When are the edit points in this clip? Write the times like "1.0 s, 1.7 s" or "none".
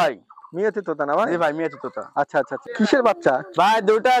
2.6 s